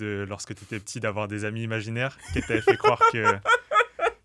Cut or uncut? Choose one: uncut